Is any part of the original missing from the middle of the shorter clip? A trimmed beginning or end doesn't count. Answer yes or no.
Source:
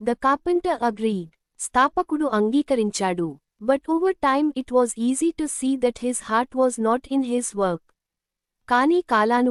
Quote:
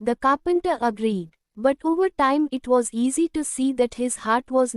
yes